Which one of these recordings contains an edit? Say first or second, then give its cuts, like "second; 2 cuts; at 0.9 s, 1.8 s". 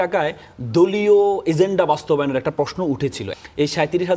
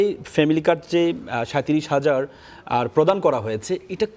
first; 1 cut; at 3.3 s